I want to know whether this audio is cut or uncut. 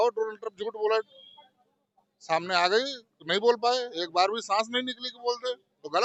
uncut